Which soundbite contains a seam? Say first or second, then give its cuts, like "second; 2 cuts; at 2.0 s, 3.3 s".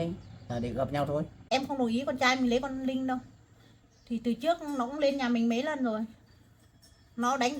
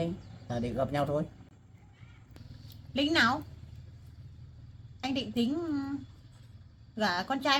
first; 1 cut; at 1.4 s